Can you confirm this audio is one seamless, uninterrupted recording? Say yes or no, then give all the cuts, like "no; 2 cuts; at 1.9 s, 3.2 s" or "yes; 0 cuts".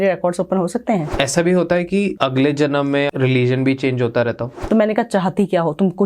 no; 4 cuts; at 1.1 s, 2.1 s, 3.1 s, 4.5 s